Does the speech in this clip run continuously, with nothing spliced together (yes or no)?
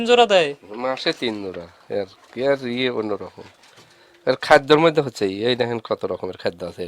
yes